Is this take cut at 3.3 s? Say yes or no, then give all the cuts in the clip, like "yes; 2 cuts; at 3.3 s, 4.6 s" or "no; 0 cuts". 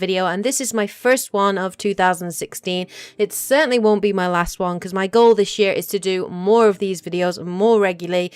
yes; 1 cut; at 3.3 s